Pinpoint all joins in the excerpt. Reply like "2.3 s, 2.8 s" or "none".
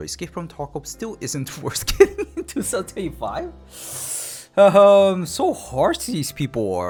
none